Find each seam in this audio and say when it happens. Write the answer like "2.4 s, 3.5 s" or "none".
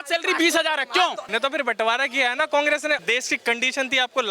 1.2 s, 3.0 s